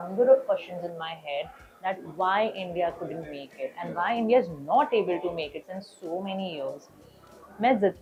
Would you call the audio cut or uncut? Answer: uncut